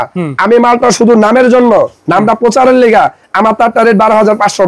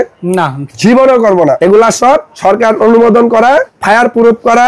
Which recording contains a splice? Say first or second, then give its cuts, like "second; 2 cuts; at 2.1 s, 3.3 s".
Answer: second; 3 cuts; at 1.6 s, 2.3 s, 3.7 s